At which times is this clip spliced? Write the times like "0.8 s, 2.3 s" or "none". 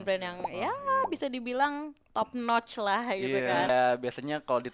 3.7 s

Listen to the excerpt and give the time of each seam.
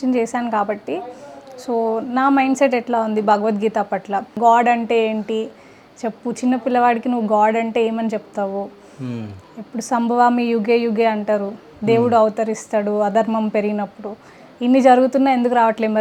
4.3 s

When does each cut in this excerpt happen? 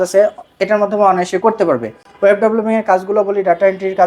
none

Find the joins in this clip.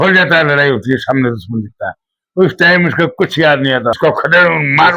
4.0 s

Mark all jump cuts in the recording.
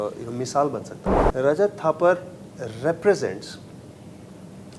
0.9 s

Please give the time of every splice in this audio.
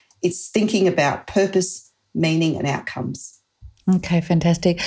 none

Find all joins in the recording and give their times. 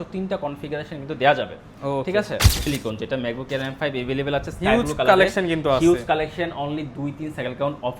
2.6 s

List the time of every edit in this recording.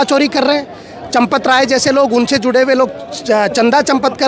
none

